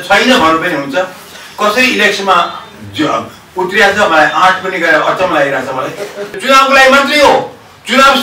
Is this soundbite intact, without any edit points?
no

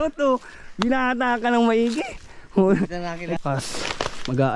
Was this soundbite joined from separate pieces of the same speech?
yes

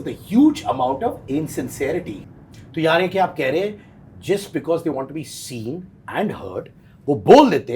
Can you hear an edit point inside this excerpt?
yes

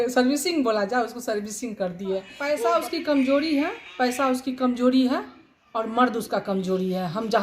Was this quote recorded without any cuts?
no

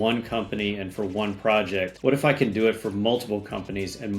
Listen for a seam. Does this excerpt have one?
yes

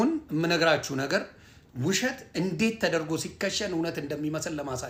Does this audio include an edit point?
no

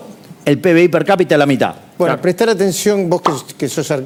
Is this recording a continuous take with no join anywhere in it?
yes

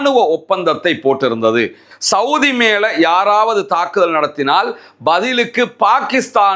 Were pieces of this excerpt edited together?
yes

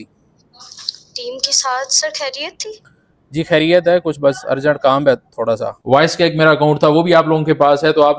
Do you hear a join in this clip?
yes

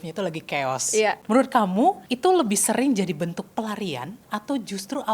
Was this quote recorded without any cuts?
no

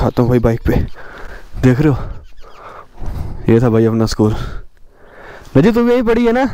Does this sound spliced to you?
no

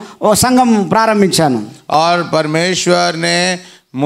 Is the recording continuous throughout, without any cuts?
no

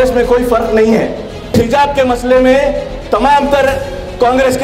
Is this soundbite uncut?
no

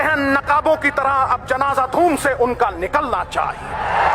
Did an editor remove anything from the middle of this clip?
no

